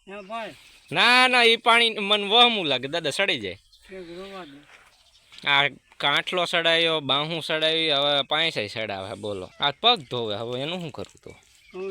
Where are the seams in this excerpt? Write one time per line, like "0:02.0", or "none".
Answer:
0:09.5